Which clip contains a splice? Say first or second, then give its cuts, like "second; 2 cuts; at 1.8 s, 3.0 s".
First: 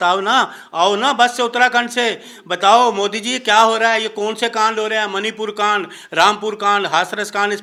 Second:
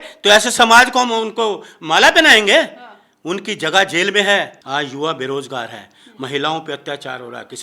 second; 1 cut; at 4.6 s